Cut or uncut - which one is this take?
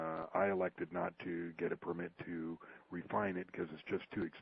cut